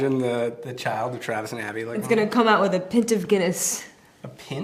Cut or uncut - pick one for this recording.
uncut